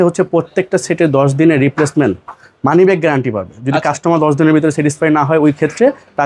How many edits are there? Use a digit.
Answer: 0